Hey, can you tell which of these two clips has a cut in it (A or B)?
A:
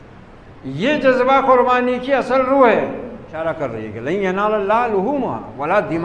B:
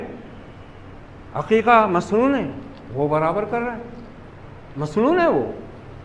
A